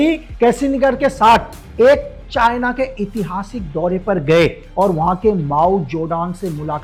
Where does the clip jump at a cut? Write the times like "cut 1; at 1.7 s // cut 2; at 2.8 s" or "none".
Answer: none